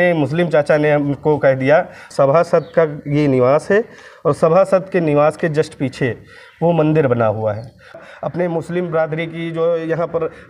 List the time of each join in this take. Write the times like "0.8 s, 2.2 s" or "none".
2.0 s, 8.0 s